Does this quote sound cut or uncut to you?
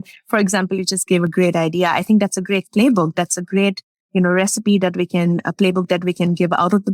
uncut